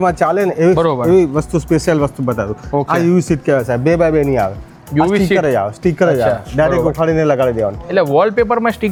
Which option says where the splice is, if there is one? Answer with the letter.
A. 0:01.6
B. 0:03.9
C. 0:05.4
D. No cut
D